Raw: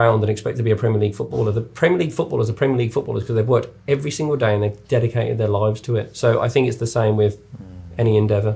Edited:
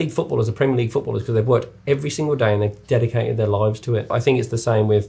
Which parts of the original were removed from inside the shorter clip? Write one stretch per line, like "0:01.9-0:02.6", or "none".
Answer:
0:06.1-0:06.4

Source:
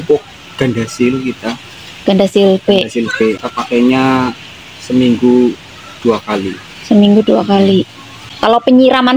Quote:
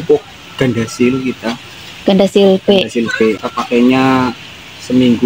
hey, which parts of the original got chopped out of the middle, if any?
none

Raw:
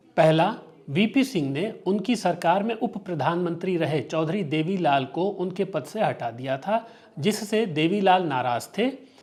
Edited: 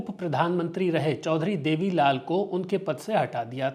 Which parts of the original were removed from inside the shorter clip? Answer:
none

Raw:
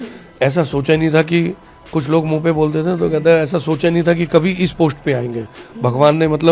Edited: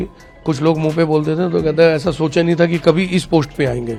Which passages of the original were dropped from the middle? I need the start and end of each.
none

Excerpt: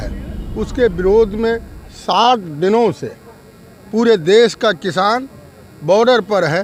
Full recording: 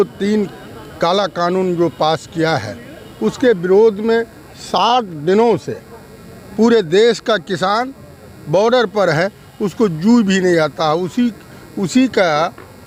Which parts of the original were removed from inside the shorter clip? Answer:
none

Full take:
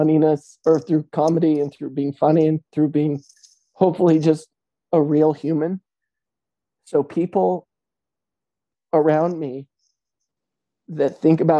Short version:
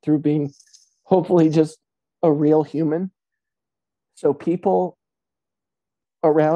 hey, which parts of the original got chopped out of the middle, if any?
none

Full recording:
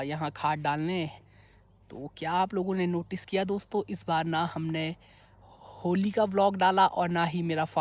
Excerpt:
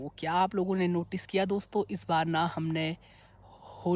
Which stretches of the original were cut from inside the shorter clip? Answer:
none

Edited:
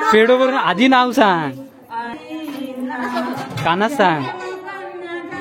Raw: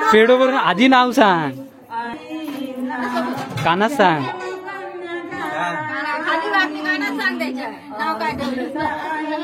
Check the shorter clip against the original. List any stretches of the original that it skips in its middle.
none

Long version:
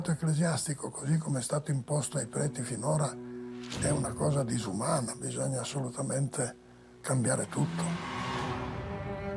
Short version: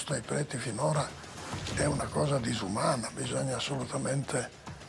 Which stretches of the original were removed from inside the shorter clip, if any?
none

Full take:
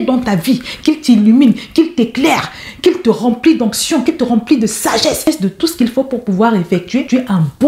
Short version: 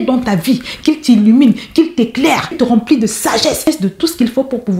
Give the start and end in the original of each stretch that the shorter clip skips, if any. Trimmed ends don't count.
0:02.6-0:04.2

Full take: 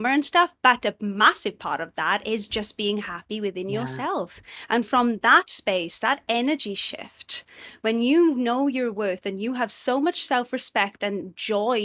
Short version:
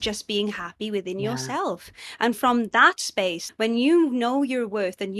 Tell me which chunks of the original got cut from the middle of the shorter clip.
0:05.9-0:07.7

